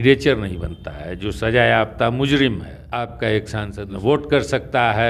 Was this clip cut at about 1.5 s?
no; 2 cuts; at 2.8 s, 3.9 s

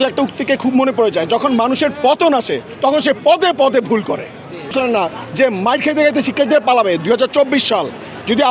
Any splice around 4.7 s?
yes; 1 cut; at 4.7 s

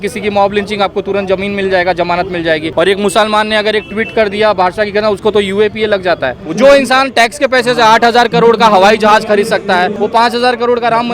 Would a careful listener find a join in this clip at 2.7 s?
yes; 3 cuts; at 2.7 s, 6.4 s, 9.9 s

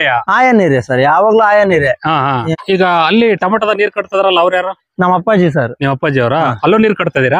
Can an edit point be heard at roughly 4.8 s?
no; 1 cut; at 2.5 s

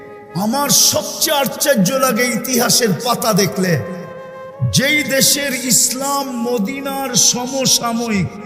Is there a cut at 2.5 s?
no; 0 cuts

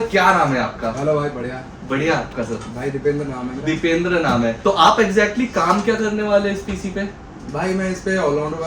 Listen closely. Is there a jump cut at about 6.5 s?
no; 2 cuts; at 2.3 s, 4.6 s

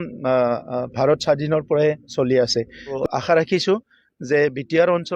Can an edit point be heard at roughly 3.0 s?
yes; 1 cut; at 3.0 s

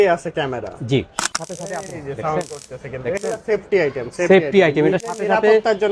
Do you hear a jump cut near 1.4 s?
yes; 1 cut; at 1.4 s

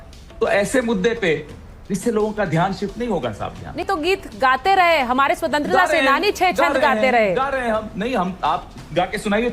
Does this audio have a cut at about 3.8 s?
yes; 1 cut; at 3.8 s

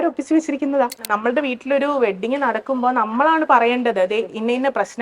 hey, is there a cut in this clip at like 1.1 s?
yes; 1 cut; at 1.1 s

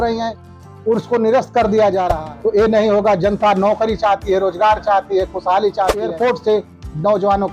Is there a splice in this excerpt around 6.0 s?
yes; 2 cuts; at 2.1 s, 6.0 s

